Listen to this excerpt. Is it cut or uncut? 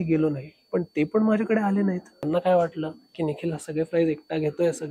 cut